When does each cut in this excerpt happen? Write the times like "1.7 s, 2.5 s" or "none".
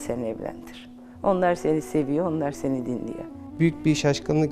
3.4 s